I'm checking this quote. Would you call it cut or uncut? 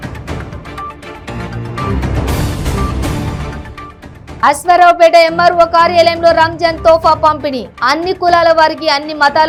uncut